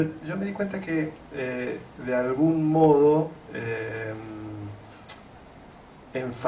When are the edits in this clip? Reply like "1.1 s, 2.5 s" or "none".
1.3 s